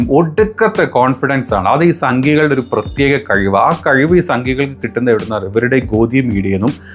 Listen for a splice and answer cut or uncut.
uncut